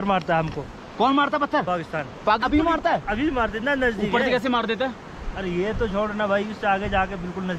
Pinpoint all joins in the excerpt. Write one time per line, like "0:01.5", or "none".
none